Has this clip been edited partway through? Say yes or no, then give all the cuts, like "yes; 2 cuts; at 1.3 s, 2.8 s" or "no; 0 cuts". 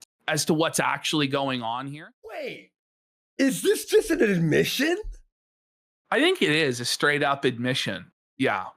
yes; 1 cut; at 1.8 s